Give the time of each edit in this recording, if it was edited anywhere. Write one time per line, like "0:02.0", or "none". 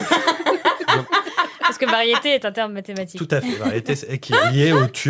none